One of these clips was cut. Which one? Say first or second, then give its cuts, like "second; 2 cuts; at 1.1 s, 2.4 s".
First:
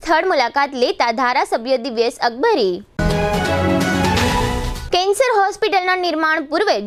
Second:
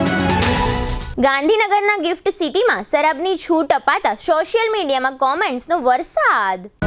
second; 1 cut; at 0.9 s